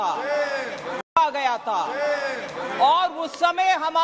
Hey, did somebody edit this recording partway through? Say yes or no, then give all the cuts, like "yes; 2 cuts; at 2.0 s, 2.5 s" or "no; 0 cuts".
no; 0 cuts